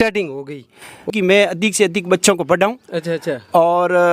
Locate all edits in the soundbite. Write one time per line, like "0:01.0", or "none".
none